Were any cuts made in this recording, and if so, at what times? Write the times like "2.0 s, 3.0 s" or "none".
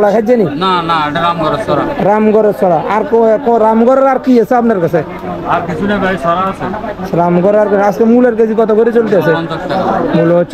none

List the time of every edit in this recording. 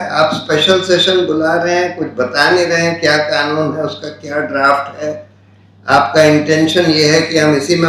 none

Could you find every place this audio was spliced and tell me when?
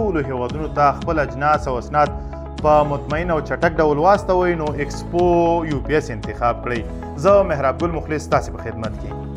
none

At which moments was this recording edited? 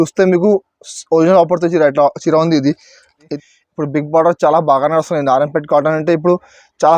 3.3 s

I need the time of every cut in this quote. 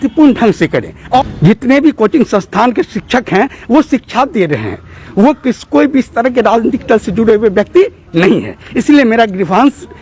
1.2 s

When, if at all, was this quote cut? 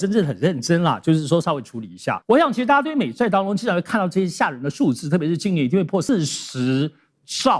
2.1 s, 6.1 s

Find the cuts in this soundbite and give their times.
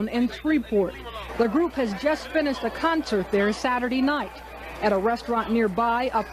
none

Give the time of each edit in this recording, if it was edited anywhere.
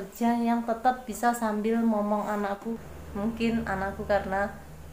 2.7 s

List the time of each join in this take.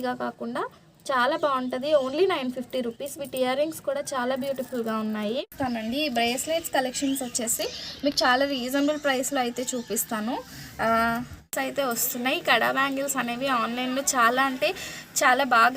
5.5 s, 11.5 s

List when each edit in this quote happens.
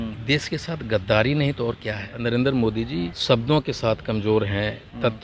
2.1 s, 3.1 s

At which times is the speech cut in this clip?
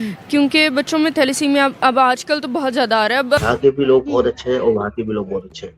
3.4 s

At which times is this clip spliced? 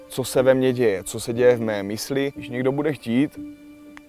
2.4 s

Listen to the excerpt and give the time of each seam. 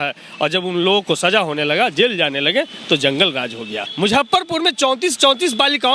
3.8 s

